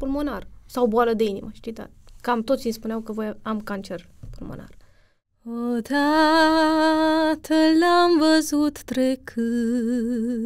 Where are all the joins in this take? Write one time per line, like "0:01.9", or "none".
0:05.5